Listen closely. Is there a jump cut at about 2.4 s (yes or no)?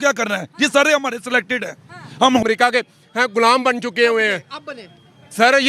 yes